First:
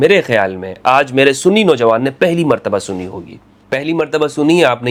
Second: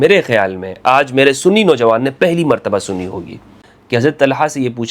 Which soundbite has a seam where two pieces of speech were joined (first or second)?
second